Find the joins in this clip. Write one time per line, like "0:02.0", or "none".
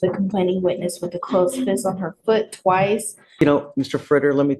0:03.2